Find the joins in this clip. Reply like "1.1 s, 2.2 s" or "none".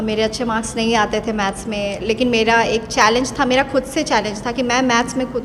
none